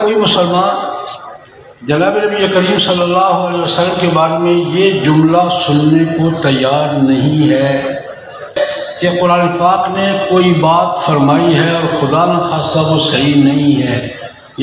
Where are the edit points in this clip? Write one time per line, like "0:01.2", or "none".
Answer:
0:08.5

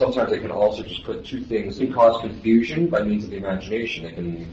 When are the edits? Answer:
0:01.8

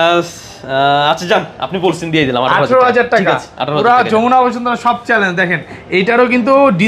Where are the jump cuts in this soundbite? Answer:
none

